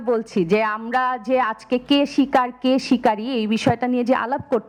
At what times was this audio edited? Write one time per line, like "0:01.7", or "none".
none